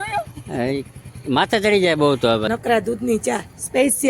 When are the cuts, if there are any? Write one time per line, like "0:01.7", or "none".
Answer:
0:02.5